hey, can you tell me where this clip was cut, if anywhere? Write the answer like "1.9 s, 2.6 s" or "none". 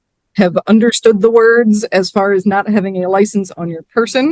none